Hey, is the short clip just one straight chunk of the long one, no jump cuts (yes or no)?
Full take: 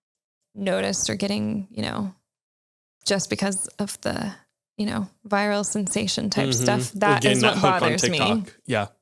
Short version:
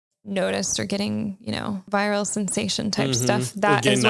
no